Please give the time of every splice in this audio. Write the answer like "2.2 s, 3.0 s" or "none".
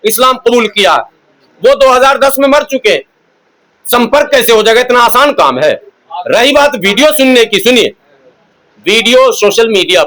none